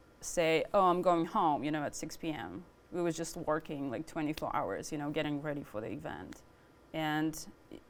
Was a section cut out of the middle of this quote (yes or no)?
no